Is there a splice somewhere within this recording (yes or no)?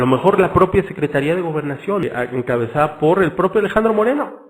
yes